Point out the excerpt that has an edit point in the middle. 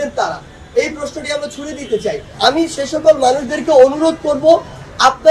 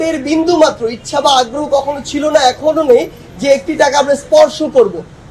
first; 1 cut; at 2.2 s

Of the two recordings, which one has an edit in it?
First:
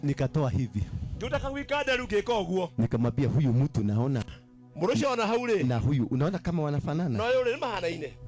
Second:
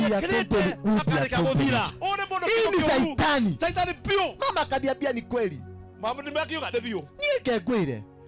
second; 1 cut; at 1.9 s

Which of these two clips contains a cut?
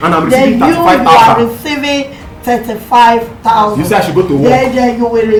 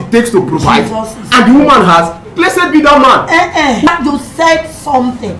second; 2 cuts; at 2.2 s, 3.9 s

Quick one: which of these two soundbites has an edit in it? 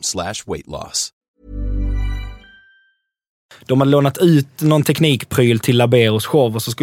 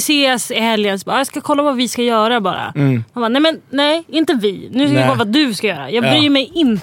first; 1 cut; at 3.5 s

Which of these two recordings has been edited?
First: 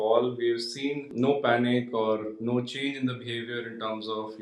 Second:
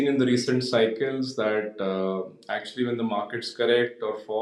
first; 1 cut; at 1.1 s

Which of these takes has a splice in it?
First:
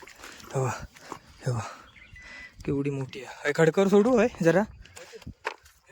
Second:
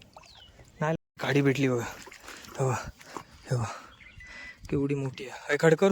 second; 1 cut; at 1.0 s

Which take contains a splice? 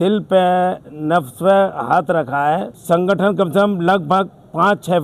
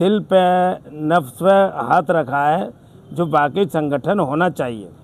first; 1 cut; at 2.7 s

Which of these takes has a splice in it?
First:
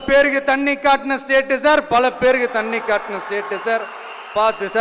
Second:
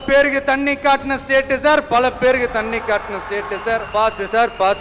second; 1 cut; at 3.9 s

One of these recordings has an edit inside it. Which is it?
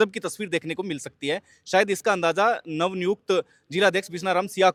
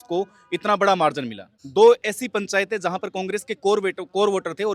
second; 1 cut; at 1.5 s

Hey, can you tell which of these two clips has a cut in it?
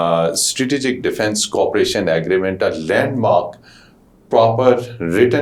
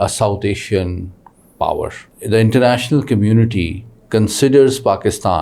second; 1 cut; at 2.0 s

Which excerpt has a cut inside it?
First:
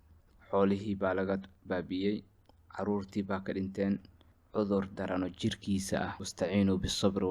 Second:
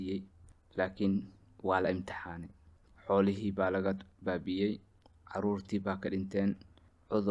first; 1 cut; at 6.2 s

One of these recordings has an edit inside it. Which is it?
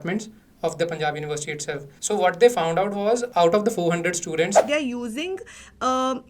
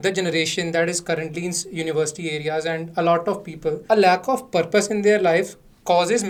first; 3 cuts; at 1.9 s, 3.3 s, 4.6 s

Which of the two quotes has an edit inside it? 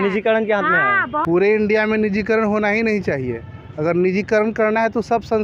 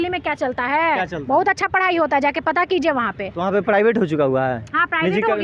first; 1 cut; at 1.2 s

